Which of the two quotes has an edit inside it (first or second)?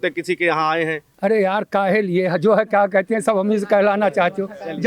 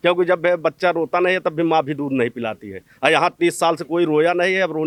first